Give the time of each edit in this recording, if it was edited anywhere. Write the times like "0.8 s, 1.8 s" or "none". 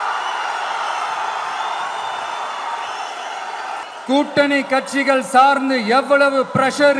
3.8 s